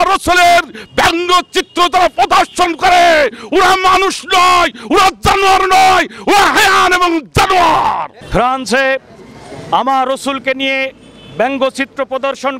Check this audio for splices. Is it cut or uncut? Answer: cut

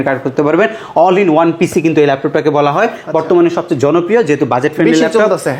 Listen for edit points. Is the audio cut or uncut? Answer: uncut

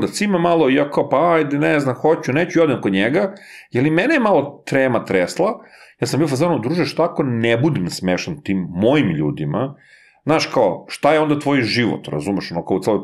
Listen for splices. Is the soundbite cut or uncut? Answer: uncut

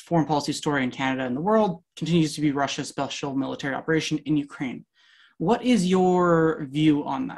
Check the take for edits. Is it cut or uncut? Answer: uncut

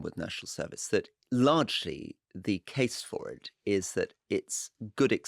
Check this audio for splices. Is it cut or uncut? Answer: cut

